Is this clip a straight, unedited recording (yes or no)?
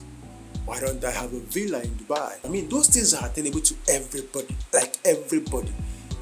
no